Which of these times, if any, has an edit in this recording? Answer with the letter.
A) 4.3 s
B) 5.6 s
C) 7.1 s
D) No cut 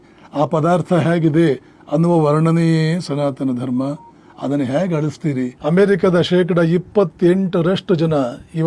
B